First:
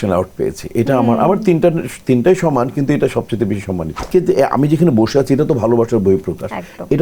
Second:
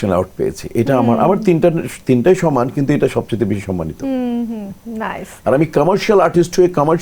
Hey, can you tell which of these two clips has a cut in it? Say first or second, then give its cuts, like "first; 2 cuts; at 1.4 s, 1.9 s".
first; 1 cut; at 4.0 s